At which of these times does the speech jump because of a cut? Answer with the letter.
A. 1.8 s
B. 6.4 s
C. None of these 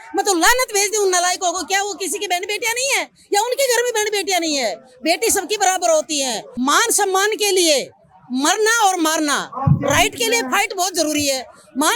B